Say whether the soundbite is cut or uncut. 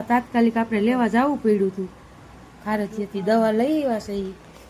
uncut